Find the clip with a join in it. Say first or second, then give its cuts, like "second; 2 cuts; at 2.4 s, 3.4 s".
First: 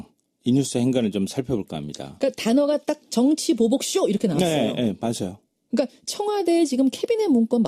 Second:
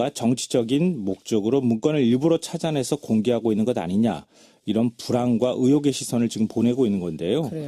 second; 1 cut; at 5.1 s